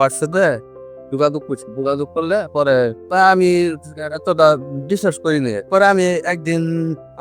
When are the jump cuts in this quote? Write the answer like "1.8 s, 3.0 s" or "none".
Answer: none

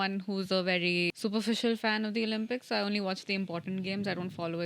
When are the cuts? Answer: 1.1 s

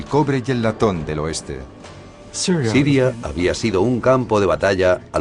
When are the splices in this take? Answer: 3.5 s

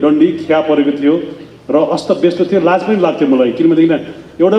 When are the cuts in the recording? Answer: none

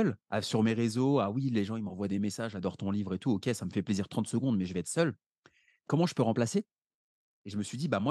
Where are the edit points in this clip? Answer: none

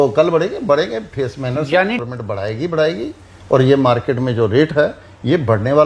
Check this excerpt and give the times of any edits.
2.0 s

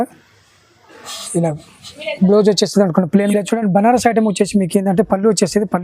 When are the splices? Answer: 3.3 s

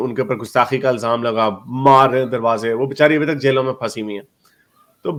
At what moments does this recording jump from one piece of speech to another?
none

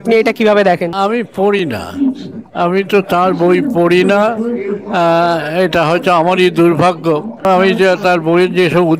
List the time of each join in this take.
0.9 s, 7.4 s

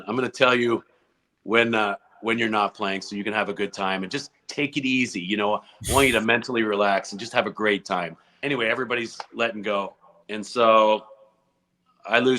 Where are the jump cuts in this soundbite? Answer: 8.4 s

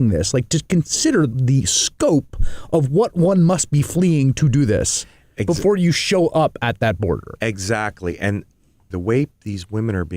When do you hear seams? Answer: 1.3 s, 8.9 s

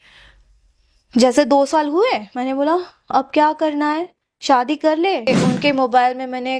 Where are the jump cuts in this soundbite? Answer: 5.3 s

